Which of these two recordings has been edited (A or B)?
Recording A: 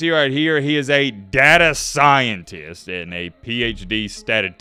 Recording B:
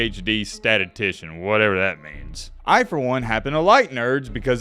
B